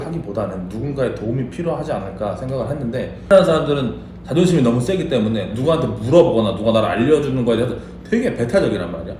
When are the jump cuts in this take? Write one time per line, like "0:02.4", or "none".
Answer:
0:03.3